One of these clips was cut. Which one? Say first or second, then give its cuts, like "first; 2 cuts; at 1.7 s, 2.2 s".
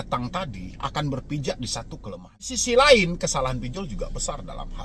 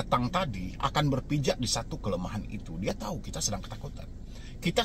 first; 1 cut; at 2.6 s